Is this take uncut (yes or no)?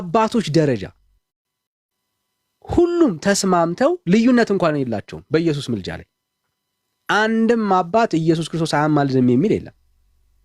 yes